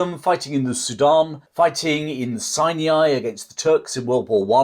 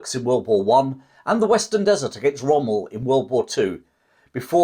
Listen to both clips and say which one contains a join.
first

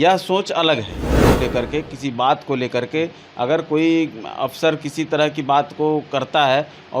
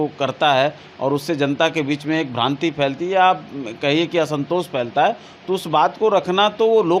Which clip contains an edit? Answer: first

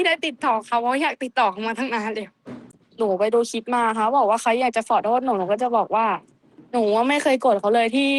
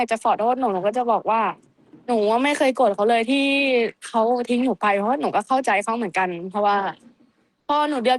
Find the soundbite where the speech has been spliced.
first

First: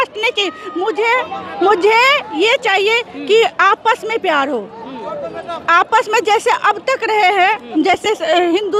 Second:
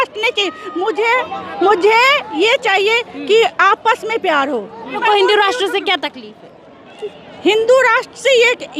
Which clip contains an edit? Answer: second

